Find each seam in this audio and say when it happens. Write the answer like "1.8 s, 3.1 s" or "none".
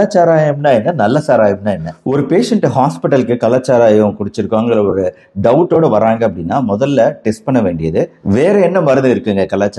2.0 s, 8.2 s